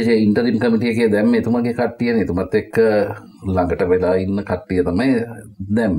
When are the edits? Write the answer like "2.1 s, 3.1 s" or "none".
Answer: none